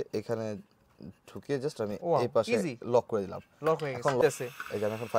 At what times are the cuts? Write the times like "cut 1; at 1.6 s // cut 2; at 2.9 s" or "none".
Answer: cut 1; at 4.2 s